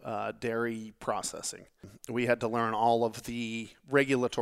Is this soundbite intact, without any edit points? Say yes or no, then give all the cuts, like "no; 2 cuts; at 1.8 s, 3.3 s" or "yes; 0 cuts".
no; 1 cut; at 1.9 s